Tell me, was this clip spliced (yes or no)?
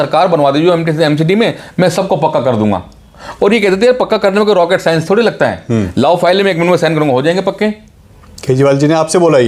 no